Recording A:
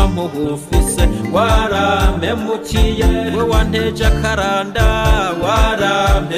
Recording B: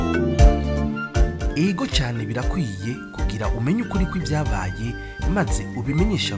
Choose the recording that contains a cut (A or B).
B